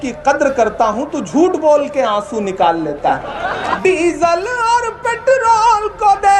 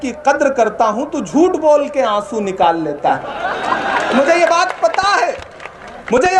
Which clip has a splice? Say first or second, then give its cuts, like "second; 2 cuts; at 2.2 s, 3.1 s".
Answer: first; 1 cut; at 3.7 s